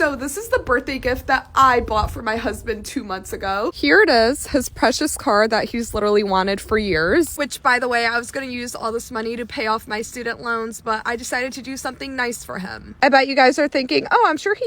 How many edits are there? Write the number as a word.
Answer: two